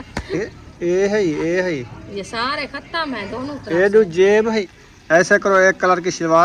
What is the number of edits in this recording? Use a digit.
1